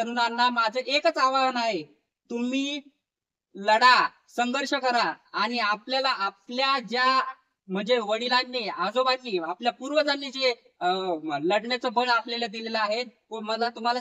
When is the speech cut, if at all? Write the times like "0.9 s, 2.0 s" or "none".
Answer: none